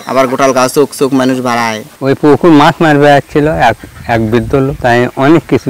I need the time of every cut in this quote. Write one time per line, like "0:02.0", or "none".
0:01.9
0:04.8